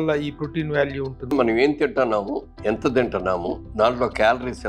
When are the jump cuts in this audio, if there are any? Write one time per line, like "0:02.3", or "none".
0:01.3
0:02.5
0:03.6

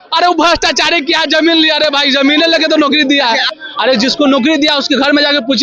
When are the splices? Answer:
0:03.5

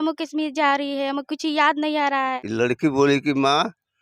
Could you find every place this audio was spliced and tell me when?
0:02.4

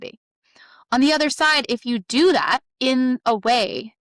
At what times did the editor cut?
0:02.7

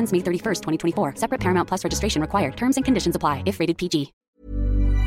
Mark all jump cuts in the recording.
0:04.2

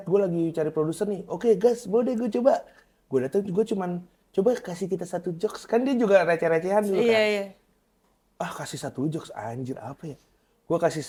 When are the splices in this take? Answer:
none

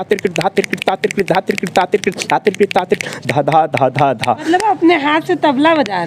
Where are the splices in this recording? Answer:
0:04.4

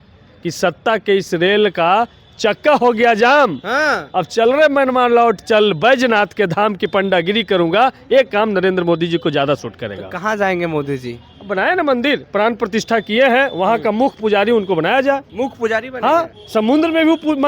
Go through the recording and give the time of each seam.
0:15.3

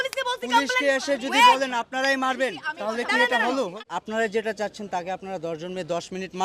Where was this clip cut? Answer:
0:03.7

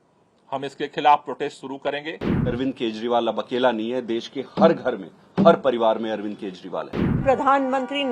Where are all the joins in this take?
0:02.3
0:07.0

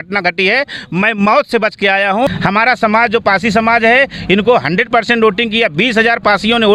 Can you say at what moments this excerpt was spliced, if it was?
0:02.3

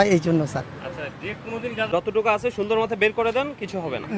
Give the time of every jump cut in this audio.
0:01.9

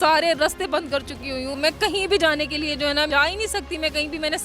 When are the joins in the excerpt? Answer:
0:01.5
0:03.1

